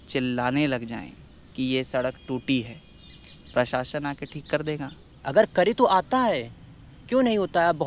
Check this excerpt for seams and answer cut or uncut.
cut